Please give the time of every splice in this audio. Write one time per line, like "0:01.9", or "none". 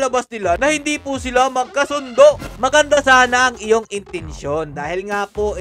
0:02.5